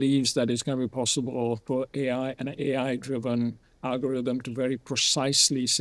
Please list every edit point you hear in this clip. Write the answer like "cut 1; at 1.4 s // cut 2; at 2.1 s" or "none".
cut 1; at 1.6 s